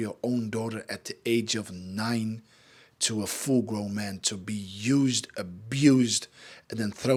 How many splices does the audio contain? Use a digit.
0